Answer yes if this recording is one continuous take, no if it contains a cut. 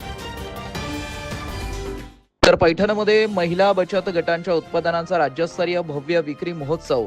yes